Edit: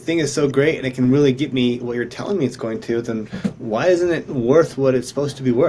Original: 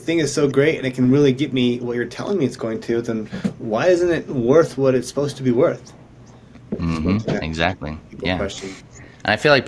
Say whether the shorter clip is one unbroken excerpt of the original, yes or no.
yes